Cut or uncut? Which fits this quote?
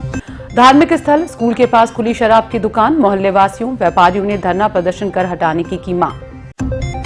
uncut